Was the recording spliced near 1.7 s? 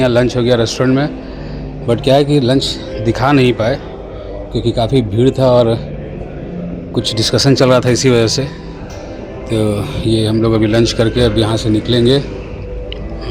no; 0 cuts

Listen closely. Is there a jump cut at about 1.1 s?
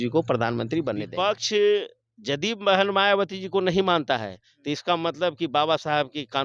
yes; 1 cut; at 1.1 s

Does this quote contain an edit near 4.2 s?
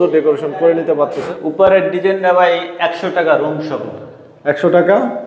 no; 1 cut; at 1.3 s

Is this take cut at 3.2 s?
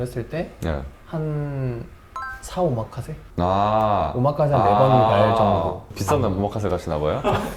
no; 1 cut; at 5.8 s

